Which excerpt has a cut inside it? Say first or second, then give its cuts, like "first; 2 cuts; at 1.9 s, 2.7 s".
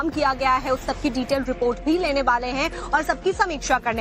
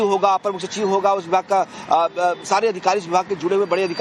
second; 1 cut; at 1.8 s